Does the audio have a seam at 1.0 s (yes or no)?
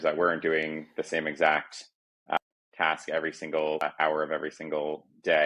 no